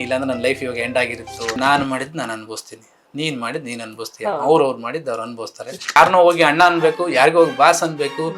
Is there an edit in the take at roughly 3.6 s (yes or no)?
no